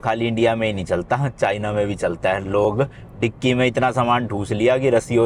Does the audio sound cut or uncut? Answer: uncut